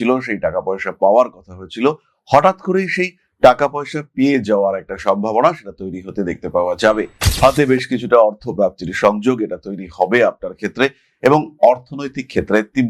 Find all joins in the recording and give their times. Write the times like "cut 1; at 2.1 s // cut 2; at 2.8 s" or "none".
none